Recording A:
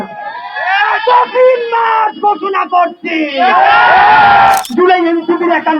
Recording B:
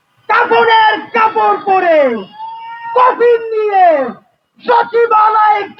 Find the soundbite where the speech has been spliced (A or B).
A